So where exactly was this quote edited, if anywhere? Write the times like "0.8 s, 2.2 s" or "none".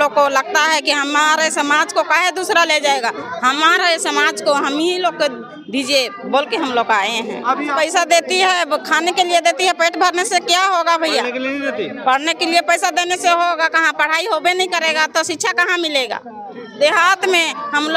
7.7 s, 16.5 s